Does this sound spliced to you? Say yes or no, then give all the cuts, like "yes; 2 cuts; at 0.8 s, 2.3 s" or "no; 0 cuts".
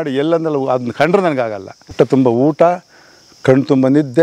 yes; 1 cut; at 1.9 s